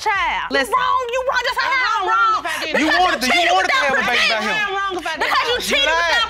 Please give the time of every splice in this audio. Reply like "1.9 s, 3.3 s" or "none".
none